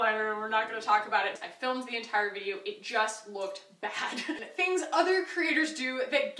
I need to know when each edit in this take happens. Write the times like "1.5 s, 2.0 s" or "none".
1.4 s, 4.5 s